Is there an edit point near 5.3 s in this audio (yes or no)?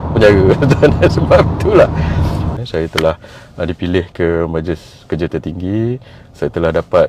no